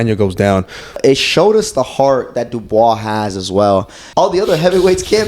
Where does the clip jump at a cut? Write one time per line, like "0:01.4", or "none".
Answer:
0:01.0
0:04.0